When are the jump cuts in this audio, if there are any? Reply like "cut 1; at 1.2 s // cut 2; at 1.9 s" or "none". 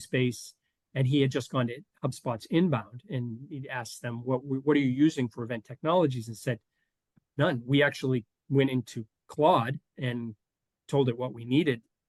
none